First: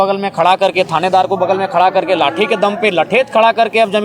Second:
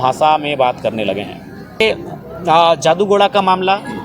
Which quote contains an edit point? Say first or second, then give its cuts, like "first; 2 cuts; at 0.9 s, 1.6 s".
second; 1 cut; at 1.8 s